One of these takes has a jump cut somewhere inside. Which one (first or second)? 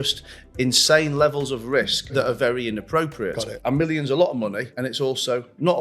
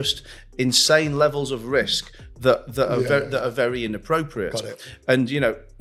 first